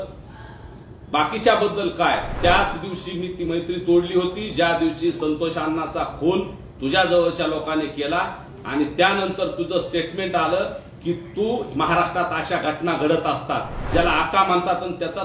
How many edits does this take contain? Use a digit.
2